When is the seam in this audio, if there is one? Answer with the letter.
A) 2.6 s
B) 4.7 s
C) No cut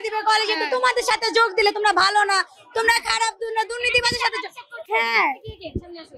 C